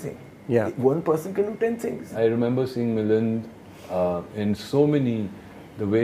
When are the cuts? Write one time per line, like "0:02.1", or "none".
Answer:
0:02.1